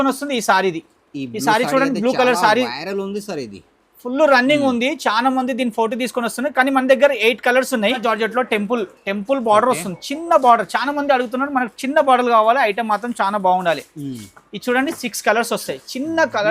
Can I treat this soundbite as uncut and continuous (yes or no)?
no